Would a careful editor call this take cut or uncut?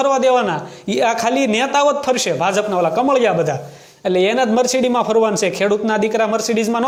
uncut